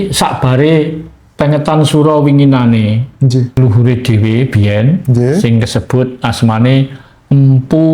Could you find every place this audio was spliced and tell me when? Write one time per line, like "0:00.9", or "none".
0:03.6